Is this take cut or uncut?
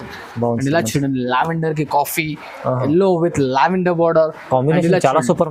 uncut